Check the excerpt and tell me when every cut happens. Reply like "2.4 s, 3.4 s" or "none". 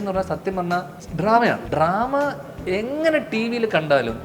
1.0 s, 1.6 s